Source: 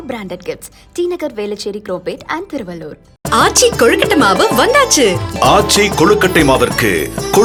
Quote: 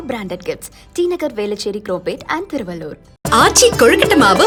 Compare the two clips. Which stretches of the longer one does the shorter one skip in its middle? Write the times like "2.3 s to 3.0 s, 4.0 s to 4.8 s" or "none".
none